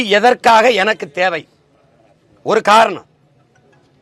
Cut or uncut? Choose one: uncut